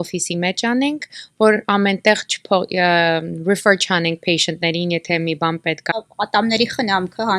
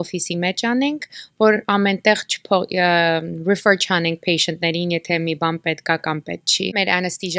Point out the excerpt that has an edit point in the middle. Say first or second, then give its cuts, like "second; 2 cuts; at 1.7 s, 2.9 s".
first; 1 cut; at 5.9 s